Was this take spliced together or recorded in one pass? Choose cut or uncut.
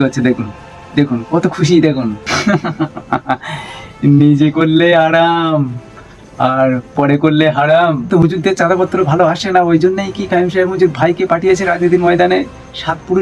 cut